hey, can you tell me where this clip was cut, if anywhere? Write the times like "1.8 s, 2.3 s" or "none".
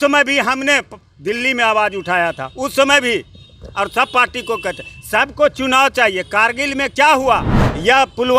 none